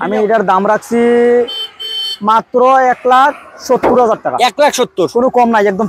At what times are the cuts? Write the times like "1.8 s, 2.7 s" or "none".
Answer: none